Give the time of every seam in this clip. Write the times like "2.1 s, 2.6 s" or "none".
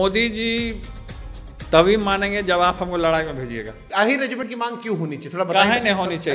3.8 s